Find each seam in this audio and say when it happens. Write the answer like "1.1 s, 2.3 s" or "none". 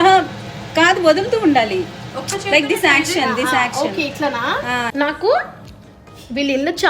4.8 s